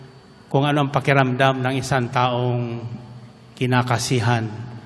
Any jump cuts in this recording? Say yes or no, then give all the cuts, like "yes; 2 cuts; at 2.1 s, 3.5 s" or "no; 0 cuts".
no; 0 cuts